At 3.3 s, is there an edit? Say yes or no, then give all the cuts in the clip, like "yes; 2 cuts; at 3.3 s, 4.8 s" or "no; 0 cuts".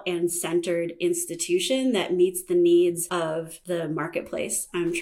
yes; 1 cut; at 3.3 s